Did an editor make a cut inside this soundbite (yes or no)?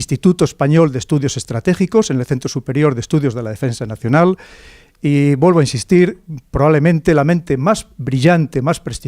yes